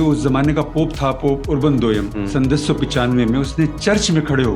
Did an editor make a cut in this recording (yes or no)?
yes